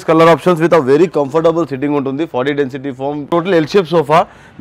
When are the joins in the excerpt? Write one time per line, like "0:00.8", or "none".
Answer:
0:03.3